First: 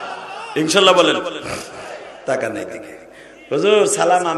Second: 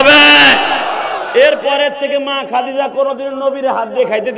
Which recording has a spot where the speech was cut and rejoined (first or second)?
first